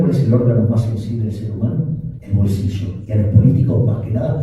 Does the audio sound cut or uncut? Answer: cut